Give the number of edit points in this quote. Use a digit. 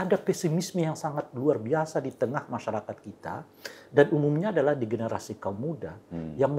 0